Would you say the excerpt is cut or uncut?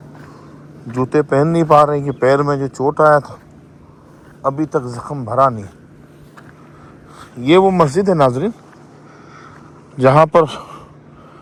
uncut